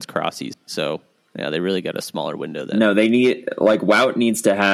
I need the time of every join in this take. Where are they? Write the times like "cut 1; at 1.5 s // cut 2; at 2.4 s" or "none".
cut 1; at 0.9 s